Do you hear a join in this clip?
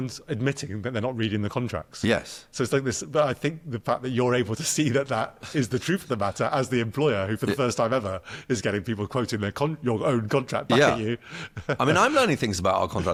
no; 0 cuts

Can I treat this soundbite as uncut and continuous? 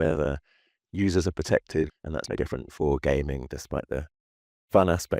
no; 1 cut; at 1.9 s

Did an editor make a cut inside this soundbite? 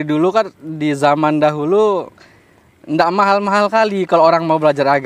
no; 0 cuts

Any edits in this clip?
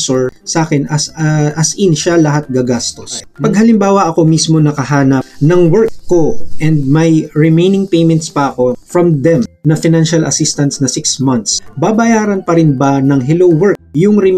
yes; 1 cut; at 3.3 s

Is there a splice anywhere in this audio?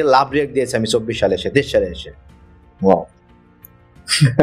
no; 0 cuts

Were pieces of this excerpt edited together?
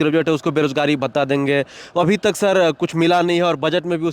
no; 0 cuts

